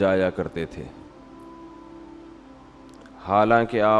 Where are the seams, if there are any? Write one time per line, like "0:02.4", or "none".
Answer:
0:00.8
0:02.9